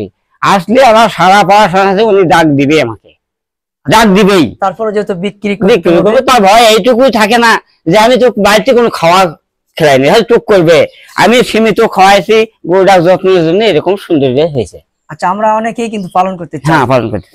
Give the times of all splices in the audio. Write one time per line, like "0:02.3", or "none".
0:06.3